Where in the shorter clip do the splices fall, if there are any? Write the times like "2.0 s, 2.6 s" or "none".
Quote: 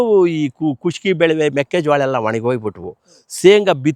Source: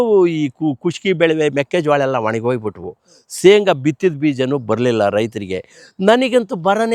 none